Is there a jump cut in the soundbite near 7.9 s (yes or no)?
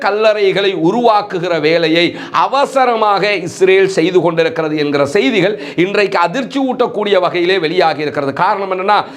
no